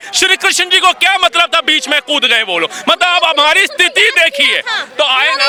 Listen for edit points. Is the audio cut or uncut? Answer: uncut